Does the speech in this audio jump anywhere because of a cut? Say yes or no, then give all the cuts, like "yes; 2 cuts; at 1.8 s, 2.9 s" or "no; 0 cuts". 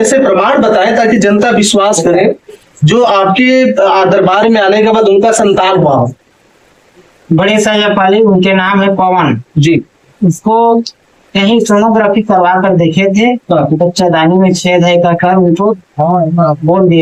no; 0 cuts